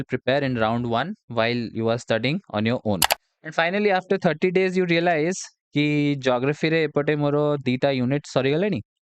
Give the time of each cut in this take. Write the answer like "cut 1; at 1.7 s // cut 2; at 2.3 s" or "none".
cut 1; at 3.2 s